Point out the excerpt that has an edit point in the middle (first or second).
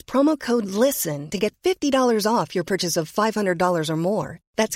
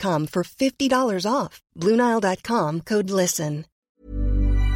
second